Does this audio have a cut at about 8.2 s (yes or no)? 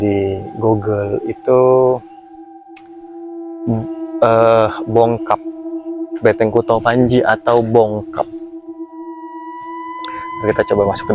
yes